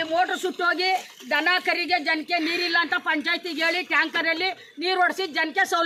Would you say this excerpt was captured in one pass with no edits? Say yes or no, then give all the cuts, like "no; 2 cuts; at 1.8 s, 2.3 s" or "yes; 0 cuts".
yes; 0 cuts